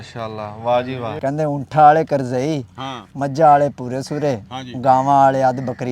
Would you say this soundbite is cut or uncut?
cut